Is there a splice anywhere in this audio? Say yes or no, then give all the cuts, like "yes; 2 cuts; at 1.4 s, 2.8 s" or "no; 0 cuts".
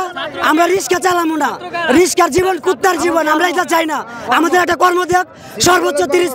no; 0 cuts